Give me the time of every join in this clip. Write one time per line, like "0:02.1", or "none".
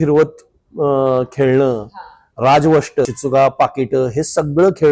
0:03.1